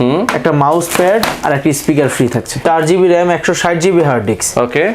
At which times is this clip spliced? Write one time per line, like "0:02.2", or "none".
0:02.6